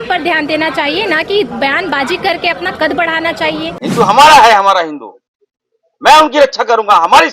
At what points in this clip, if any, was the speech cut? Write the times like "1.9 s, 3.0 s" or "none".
3.8 s